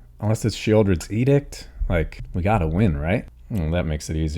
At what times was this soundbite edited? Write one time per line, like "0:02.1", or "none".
0:02.2
0:03.4